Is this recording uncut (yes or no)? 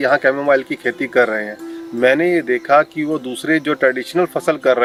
yes